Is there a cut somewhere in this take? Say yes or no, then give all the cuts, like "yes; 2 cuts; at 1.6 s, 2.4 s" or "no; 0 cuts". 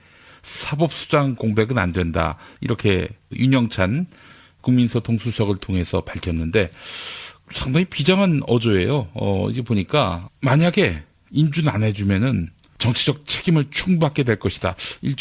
no; 0 cuts